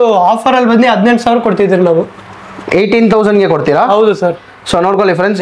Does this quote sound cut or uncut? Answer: uncut